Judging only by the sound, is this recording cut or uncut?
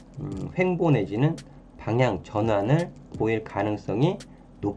uncut